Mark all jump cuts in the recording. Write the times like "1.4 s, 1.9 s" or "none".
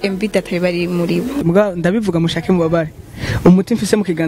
1.4 s